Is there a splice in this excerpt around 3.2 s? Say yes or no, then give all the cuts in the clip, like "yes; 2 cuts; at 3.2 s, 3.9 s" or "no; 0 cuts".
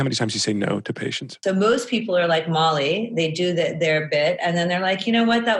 no; 1 cut; at 1.4 s